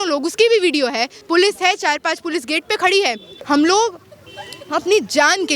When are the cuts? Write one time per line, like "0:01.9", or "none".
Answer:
0:01.1
0:03.3